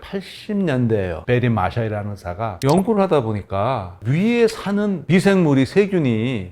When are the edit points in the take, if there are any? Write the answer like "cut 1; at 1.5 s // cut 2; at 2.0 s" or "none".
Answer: none